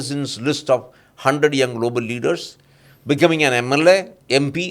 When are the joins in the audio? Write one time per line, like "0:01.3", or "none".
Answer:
none

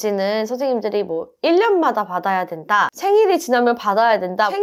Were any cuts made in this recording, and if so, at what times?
none

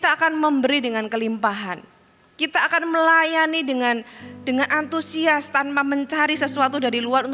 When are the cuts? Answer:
none

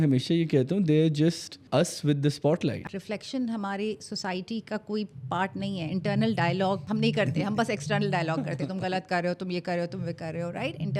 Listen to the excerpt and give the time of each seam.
0:01.5
0:02.8
0:06.8

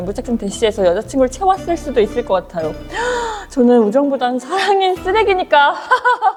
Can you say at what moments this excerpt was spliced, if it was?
none

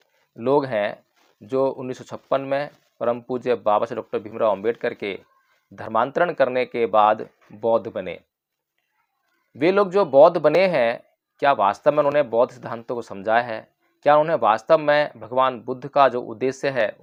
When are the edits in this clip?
none

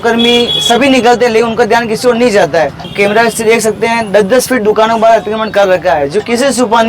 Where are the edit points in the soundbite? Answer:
0:02.9

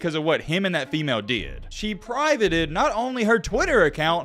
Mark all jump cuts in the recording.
0:01.6

